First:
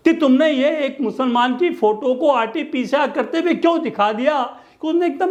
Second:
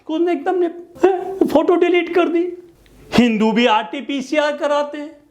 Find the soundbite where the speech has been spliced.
second; 1 cut; at 2.6 s

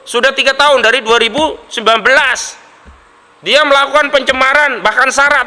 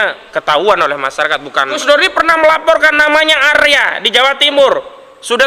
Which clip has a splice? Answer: second; 1 cut; at 1.8 s

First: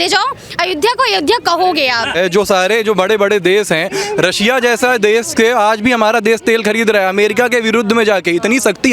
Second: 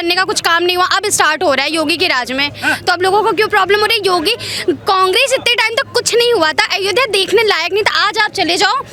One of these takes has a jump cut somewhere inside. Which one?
first; 1 cut; at 2.1 s

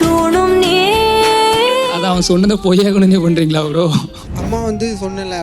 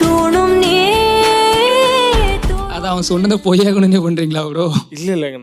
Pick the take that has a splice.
first; 2 cuts; at 1.9 s, 4.1 s

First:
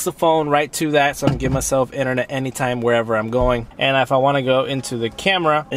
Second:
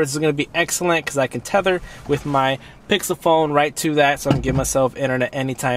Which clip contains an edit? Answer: first; 1 cut; at 3.7 s

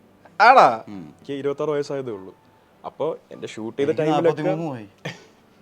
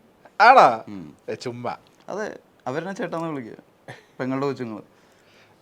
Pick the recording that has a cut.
first; 1 cut; at 1.2 s

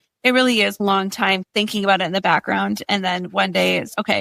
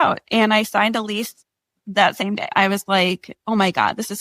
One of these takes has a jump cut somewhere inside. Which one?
second; 1 cut; at 2.5 s

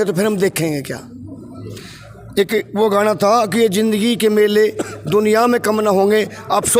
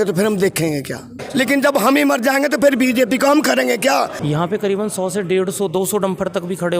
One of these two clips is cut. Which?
second; 2 cuts; at 1.2 s, 4.2 s

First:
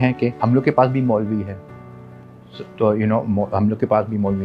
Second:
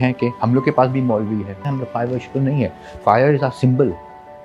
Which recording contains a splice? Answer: second; 1 cut; at 1.6 s

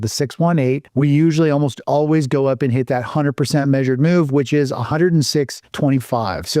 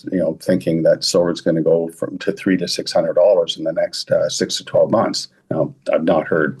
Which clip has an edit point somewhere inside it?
first; 2 cuts; at 0.9 s, 5.6 s

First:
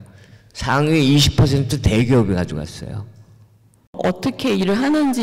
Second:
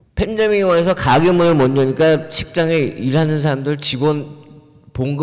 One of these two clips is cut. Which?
first; 1 cut; at 3.9 s

